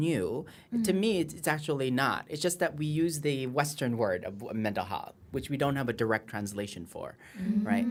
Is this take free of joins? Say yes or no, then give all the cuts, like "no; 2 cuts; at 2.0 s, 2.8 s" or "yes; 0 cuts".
yes; 0 cuts